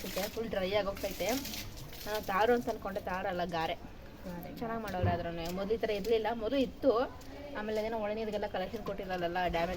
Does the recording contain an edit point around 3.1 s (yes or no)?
no